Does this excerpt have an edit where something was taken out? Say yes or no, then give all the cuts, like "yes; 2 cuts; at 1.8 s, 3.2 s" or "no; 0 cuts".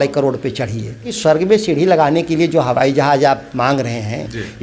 yes; 1 cut; at 1.1 s